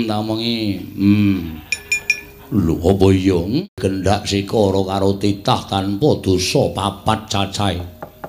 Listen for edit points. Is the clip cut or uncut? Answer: cut